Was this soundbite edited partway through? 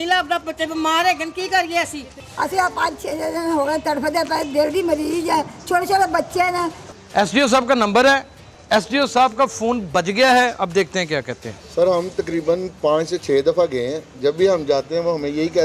yes; 3 cuts; at 2.2 s, 6.8 s, 11.6 s

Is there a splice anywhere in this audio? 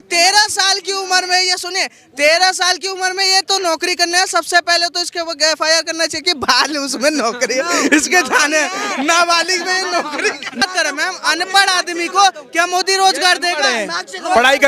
yes; 1 cut; at 10.6 s

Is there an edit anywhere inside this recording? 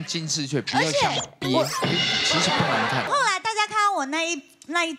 yes; 1 cut; at 3.1 s

